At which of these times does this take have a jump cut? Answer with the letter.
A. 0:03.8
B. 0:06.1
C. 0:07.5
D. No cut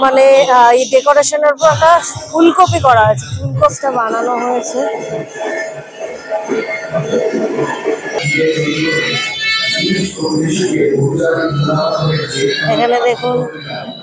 A